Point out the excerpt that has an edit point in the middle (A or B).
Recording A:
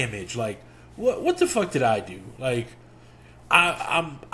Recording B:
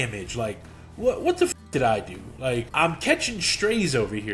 B